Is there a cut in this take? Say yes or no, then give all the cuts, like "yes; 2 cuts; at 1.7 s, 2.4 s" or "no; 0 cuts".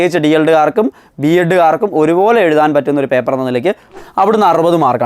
yes; 1 cut; at 3.9 s